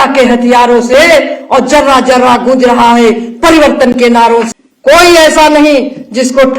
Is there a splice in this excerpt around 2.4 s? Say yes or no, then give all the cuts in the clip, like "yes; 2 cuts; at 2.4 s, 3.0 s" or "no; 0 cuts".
no; 1 cut; at 4.5 s